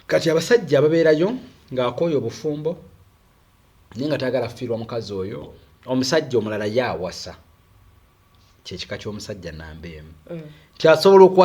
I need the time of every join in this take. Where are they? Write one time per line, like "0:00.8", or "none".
0:05.5